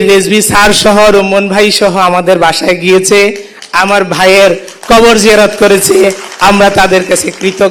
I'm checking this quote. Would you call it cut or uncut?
uncut